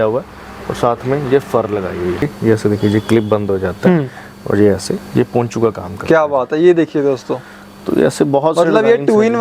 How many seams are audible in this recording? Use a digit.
1